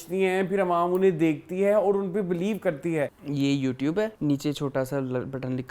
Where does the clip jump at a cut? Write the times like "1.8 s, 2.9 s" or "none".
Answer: 3.2 s, 4.1 s